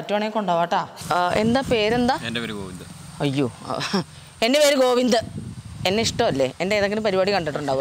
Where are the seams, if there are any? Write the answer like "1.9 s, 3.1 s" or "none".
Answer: 0.9 s